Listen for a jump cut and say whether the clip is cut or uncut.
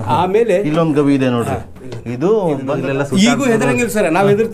cut